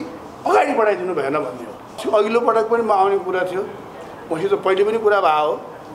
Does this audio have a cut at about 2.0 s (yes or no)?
yes